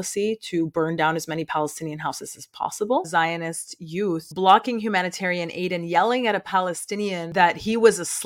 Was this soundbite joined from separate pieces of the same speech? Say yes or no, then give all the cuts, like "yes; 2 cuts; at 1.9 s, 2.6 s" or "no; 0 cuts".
yes; 3 cuts; at 3.1 s, 4.3 s, 7.2 s